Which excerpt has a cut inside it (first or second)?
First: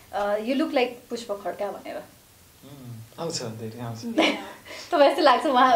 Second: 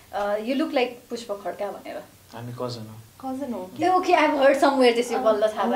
second